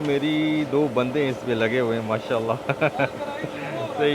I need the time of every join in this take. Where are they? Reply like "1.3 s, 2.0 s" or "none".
none